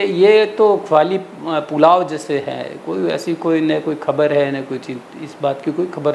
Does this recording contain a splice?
no; 0 cuts

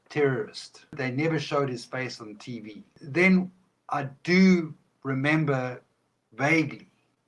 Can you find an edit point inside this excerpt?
yes; 2 cuts; at 0.9 s, 3.0 s

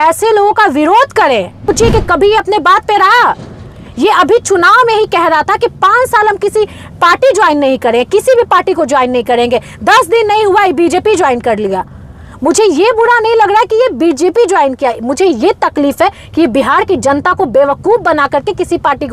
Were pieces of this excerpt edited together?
yes; 1 cut; at 1.7 s

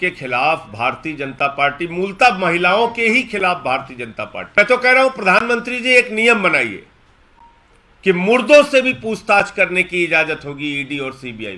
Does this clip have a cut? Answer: yes; 1 cut; at 4.6 s

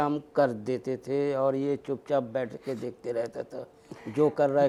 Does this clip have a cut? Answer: no; 0 cuts

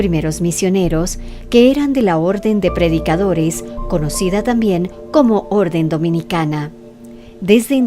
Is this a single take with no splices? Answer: no; 1 cut; at 6.6 s

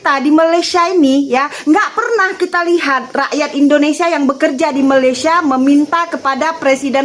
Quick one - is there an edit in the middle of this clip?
no; 0 cuts

